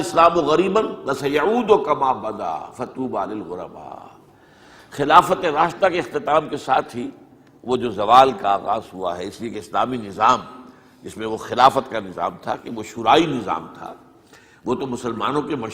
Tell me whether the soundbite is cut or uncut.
uncut